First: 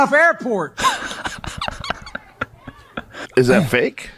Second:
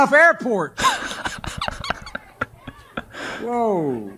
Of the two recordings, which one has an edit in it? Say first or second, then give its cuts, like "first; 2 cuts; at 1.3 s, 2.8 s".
first; 1 cut; at 3.1 s